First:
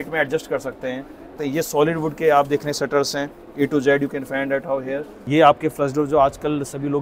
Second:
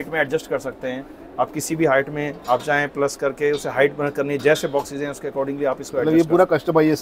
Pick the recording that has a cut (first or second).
first